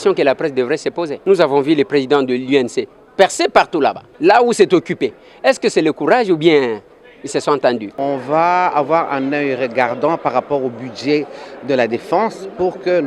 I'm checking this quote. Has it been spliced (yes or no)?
yes